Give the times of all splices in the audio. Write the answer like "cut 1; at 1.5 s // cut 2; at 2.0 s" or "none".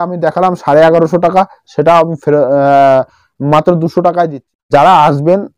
cut 1; at 4.7 s